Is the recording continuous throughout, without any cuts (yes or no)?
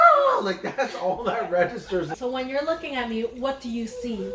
no